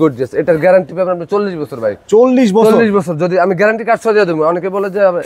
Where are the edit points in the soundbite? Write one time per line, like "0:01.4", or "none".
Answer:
none

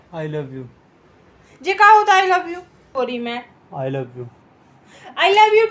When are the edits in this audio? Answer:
0:02.9

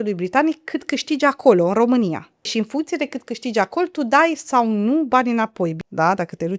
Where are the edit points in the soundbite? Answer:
0:02.5
0:05.8

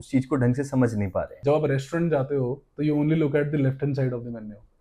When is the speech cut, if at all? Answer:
0:01.3

